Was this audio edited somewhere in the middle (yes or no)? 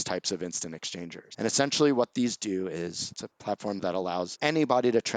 yes